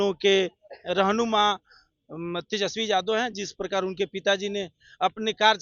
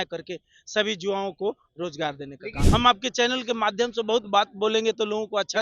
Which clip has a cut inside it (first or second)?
second